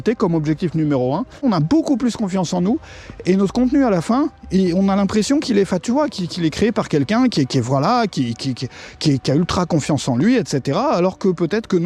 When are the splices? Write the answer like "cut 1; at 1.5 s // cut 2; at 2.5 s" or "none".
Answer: cut 1; at 1.4 s